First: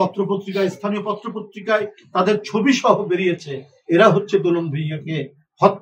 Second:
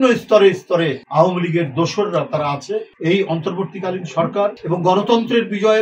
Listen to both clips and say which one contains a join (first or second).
second